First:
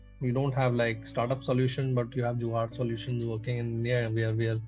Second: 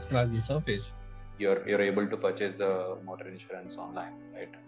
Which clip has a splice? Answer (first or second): second